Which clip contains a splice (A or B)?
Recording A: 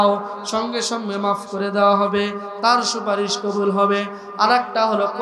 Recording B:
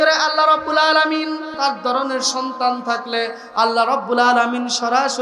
B